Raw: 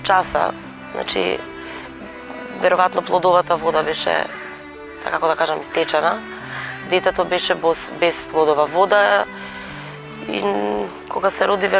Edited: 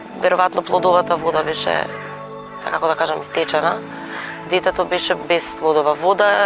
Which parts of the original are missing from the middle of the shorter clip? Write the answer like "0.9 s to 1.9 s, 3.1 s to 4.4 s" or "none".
7.6 s to 7.9 s